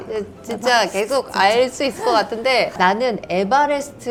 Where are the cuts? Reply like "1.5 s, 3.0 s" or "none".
none